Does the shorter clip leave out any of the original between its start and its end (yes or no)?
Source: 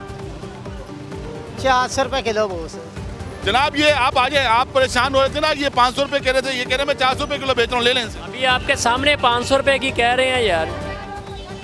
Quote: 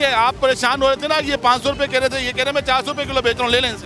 no